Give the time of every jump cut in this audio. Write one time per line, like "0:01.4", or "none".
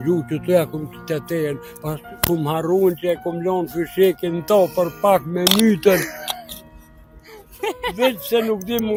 none